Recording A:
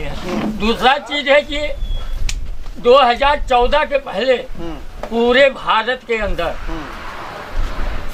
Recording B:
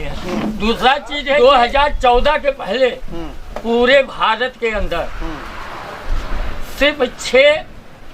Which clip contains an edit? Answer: B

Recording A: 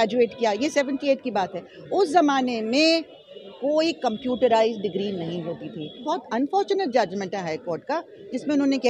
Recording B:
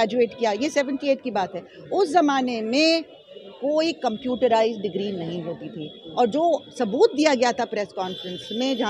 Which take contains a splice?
A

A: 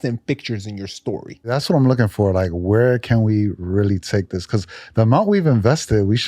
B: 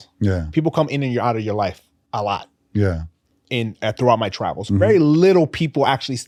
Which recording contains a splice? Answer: A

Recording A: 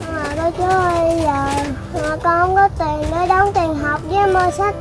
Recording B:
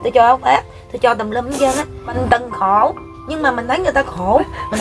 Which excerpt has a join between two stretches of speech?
B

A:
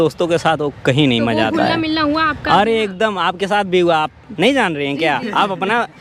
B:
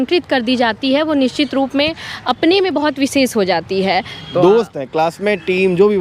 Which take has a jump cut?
B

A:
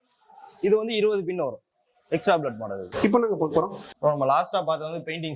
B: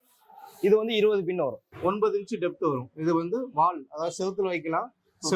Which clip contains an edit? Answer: B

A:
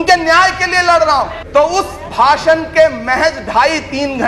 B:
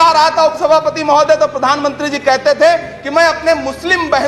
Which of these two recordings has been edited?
A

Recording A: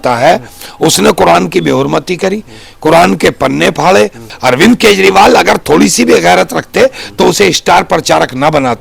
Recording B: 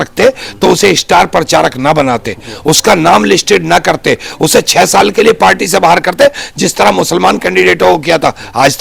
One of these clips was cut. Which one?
A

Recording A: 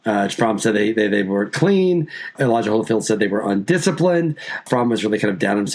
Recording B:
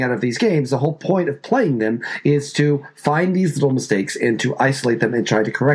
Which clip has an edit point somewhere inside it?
A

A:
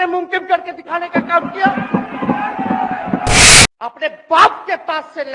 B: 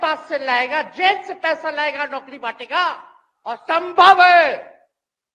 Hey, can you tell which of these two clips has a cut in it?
A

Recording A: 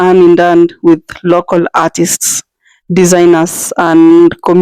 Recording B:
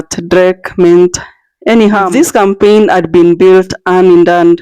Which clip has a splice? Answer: B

